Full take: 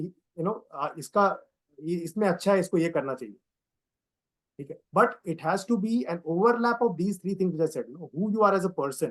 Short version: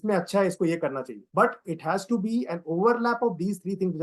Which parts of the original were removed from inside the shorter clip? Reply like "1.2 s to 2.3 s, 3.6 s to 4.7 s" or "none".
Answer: 3.3 s to 4.8 s